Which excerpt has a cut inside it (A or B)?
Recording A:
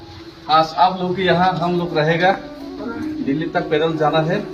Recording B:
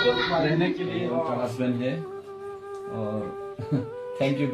B